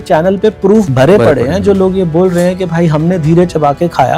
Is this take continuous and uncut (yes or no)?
no